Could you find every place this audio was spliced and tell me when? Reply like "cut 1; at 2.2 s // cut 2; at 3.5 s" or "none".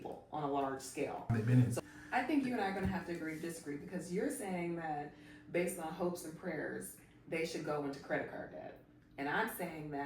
cut 1; at 1.3 s